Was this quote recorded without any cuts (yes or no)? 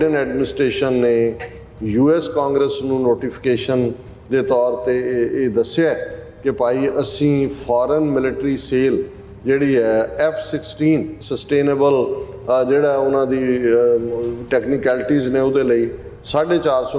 no